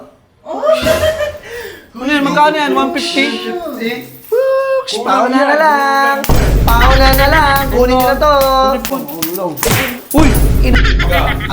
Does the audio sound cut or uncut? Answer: cut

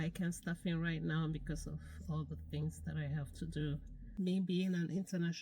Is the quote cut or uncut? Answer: cut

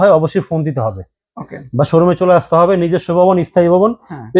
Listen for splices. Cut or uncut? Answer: uncut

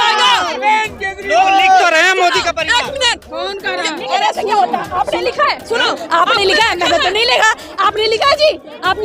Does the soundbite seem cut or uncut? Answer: uncut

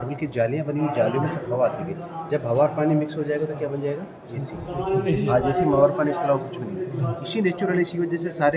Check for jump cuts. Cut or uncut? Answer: uncut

